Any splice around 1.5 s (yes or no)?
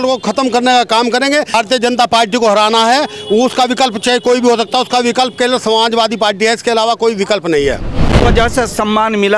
yes